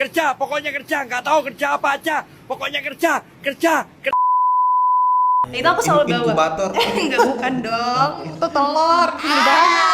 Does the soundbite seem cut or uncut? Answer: cut